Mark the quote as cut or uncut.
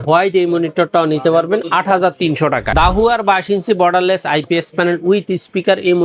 cut